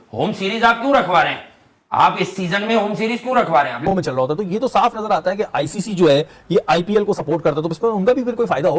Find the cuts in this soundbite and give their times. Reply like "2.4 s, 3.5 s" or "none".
3.8 s